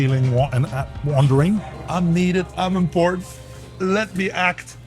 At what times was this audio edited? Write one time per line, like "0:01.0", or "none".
0:01.8